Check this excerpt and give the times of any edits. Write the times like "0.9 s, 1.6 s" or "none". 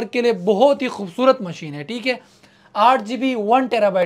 none

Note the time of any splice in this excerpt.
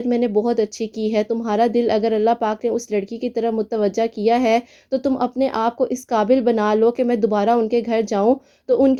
none

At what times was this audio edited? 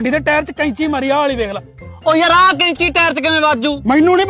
1.8 s

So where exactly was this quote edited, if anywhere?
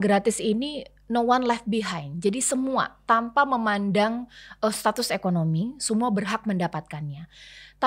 none

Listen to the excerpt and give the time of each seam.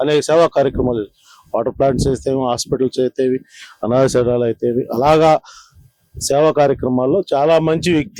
none

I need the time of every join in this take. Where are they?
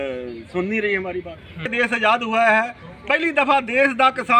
1.7 s

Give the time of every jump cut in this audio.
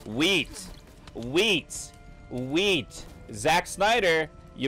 none

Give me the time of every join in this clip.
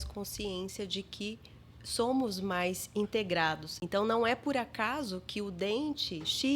3.7 s

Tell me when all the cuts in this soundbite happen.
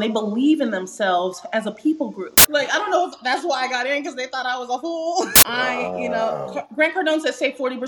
2.4 s, 5.4 s

